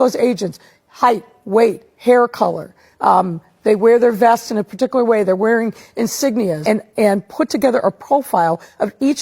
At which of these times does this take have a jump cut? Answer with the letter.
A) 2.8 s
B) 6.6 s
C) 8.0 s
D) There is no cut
B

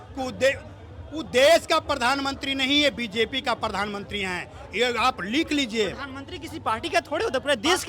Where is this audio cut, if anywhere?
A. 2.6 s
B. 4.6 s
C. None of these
C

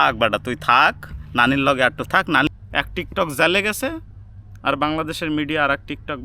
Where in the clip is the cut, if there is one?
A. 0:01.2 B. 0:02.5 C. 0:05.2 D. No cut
B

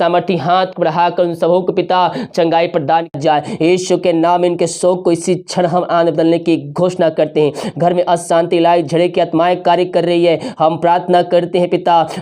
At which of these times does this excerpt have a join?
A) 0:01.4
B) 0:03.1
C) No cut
B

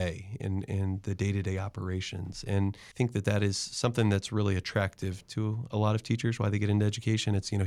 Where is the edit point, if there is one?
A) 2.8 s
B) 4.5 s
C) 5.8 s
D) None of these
A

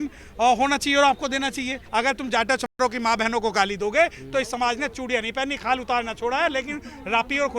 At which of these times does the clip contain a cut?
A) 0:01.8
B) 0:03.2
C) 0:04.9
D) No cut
A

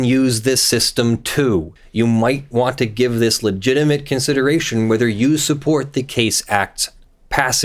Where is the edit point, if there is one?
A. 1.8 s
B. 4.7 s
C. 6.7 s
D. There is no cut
A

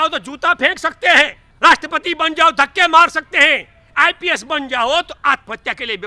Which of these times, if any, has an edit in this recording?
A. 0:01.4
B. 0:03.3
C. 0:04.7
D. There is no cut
A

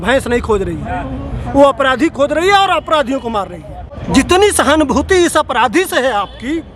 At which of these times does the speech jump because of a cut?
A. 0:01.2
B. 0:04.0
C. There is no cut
B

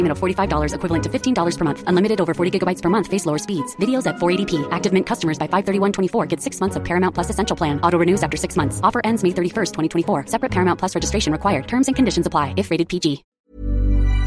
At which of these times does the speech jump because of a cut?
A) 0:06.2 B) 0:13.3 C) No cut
B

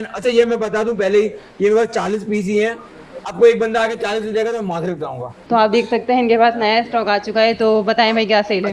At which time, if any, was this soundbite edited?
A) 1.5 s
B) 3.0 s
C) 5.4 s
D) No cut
C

